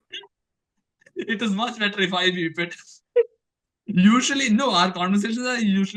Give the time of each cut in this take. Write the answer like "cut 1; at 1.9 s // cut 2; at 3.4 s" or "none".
none

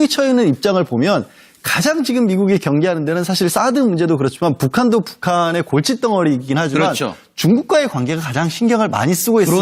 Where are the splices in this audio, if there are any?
cut 1; at 7.8 s

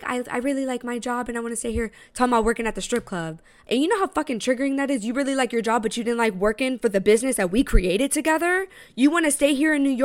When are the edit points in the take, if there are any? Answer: cut 1; at 3.5 s

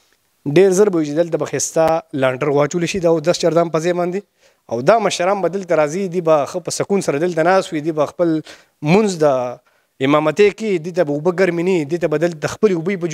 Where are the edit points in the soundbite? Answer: none

